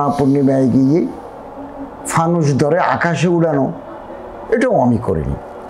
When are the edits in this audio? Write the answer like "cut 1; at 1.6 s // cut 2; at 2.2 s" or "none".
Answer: none

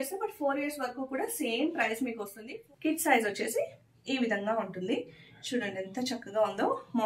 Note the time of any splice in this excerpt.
cut 1; at 2.3 s

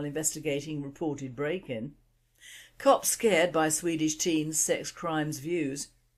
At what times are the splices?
cut 1; at 1.8 s

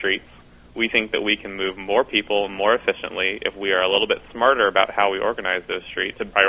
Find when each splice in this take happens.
none

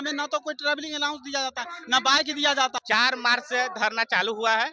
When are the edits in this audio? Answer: cut 1; at 2.7 s

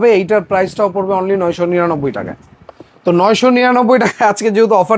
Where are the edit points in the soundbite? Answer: none

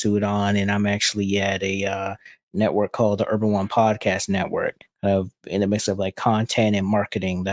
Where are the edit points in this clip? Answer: cut 1; at 4.8 s

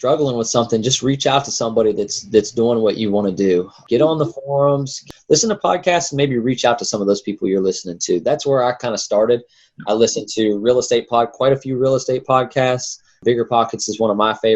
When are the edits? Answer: none

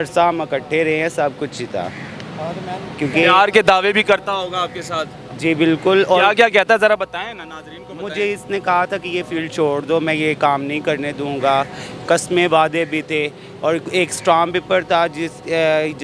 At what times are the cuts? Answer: none

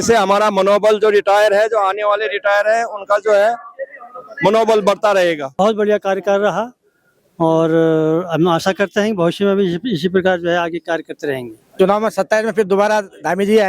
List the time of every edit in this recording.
cut 1; at 5.6 s // cut 2; at 11.7 s

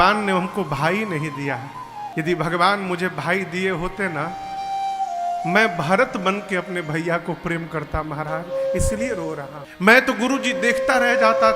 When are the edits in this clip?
cut 1; at 2.1 s // cut 2; at 9.6 s

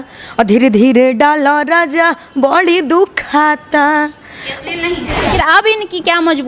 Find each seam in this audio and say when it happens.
cut 1; at 5.2 s

